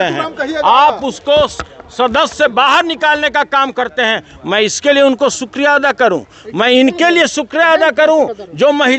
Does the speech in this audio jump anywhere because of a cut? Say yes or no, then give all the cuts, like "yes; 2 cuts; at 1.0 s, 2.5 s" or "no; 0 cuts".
no; 0 cuts